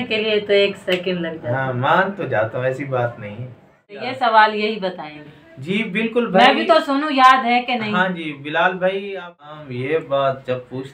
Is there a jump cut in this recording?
yes; 2 cuts; at 4.1 s, 9.3 s

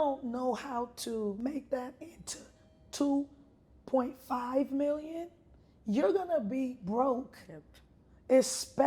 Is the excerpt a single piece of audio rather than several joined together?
no; 1 cut; at 1.4 s

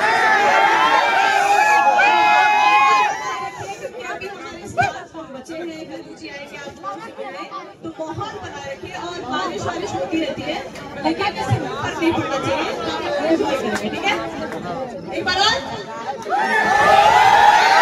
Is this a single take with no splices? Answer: yes; 0 cuts

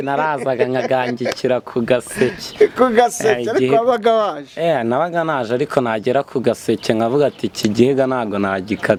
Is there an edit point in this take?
no; 0 cuts

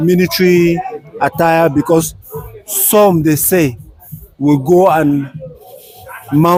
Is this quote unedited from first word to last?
yes; 0 cuts

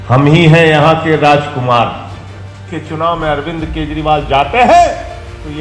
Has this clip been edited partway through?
yes; 1 cut; at 2.6 s

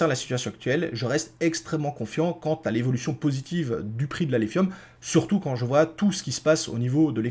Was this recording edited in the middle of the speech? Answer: no; 0 cuts

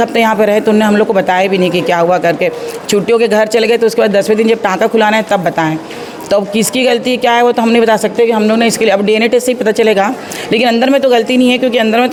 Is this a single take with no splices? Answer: yes; 0 cuts

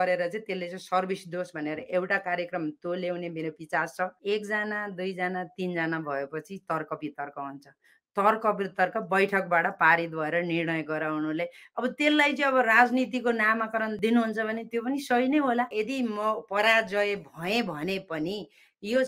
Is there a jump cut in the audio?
yes; 2 cuts; at 4.2 s, 15.7 s

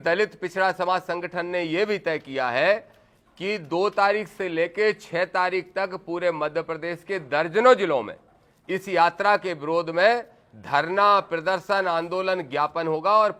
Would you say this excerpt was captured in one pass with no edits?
yes; 0 cuts

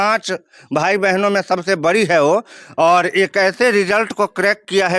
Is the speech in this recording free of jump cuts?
yes; 0 cuts

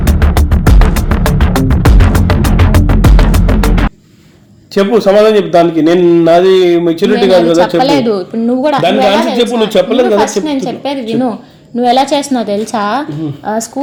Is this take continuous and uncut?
yes; 0 cuts

